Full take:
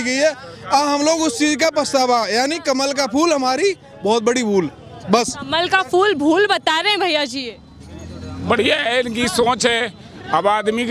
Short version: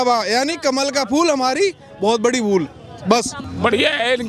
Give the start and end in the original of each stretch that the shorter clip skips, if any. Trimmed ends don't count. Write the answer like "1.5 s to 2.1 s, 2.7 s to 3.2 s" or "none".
5.4 s to 8.2 s